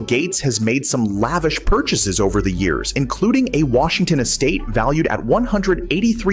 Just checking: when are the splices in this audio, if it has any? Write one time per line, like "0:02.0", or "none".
none